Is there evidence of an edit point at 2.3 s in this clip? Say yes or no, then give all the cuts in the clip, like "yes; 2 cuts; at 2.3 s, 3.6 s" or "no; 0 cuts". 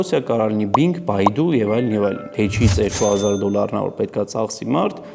yes; 1 cut; at 2.3 s